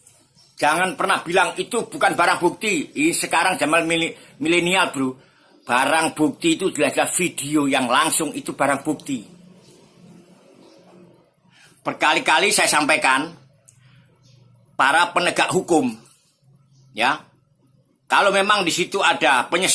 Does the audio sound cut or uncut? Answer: uncut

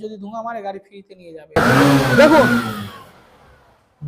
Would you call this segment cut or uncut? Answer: cut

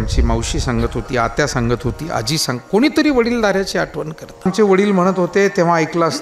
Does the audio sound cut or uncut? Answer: cut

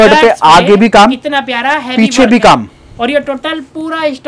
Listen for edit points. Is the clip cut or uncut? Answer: uncut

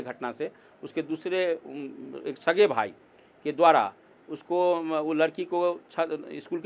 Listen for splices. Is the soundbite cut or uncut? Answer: uncut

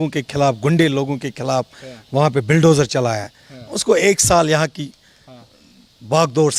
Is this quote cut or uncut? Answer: uncut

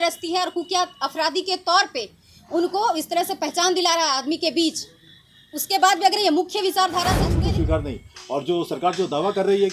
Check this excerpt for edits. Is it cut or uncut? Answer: cut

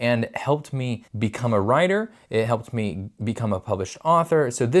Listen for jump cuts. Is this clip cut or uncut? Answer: cut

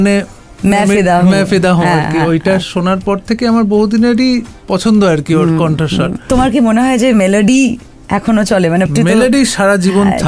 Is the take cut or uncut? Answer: cut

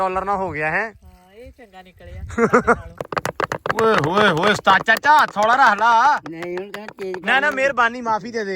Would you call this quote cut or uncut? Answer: cut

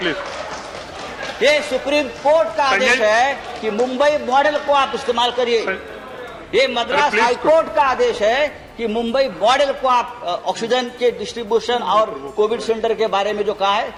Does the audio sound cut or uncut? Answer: uncut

